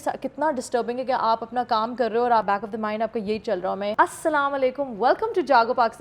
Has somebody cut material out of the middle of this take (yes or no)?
yes